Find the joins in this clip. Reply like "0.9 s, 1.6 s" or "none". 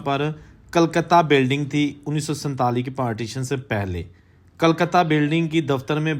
none

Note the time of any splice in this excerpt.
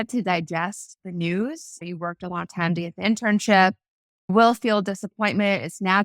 4.3 s

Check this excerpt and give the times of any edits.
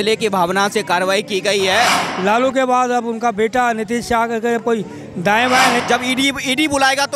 2.0 s, 5.8 s

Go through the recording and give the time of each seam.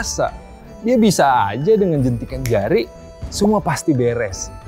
none

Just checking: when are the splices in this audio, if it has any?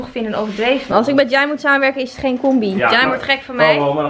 0.9 s, 2.8 s

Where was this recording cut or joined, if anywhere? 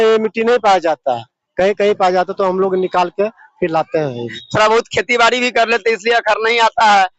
4.4 s

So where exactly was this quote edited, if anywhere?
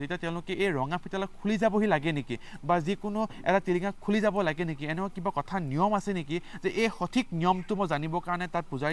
none

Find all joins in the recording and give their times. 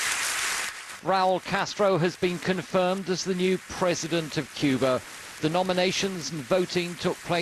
1.5 s

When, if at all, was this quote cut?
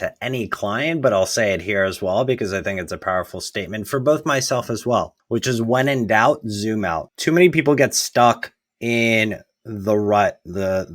5.2 s, 7.1 s

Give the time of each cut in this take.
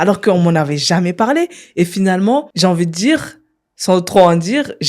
2.5 s

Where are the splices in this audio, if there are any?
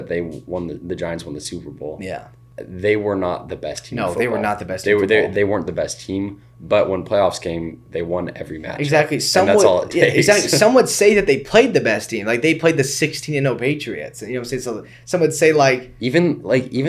2.4 s, 5.3 s

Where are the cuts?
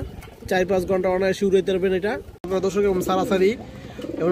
2.5 s

